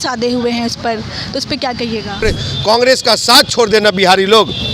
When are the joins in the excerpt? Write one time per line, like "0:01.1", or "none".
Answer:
0:02.2